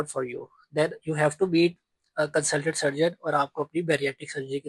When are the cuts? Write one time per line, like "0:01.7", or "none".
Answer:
none